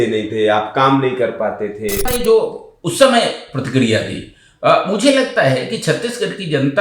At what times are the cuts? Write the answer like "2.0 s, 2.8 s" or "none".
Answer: 2.1 s